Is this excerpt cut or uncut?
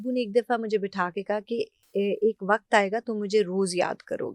cut